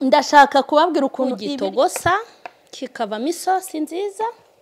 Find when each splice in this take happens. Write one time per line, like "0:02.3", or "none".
0:01.4

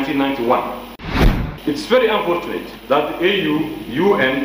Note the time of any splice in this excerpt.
0:01.1
0:02.7

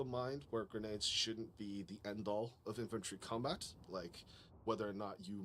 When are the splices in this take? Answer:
0:04.4

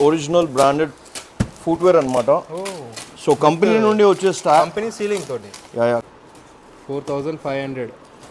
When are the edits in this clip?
0:06.0

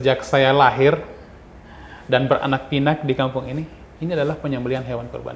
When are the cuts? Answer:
none

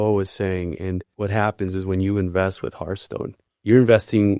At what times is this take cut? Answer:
0:01.1
0:03.4

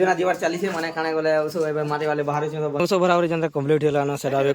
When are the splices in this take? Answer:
0:02.8

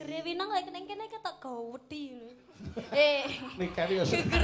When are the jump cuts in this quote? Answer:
none

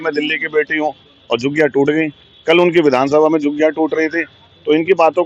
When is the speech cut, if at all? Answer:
none

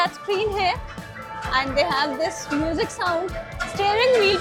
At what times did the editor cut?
none

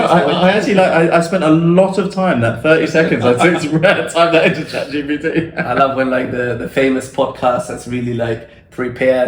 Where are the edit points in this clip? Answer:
none

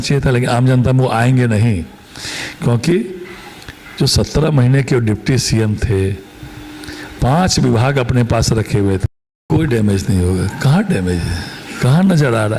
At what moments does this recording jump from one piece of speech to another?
0:09.1

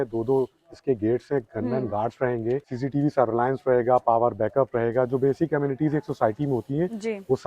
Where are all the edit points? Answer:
0:02.7

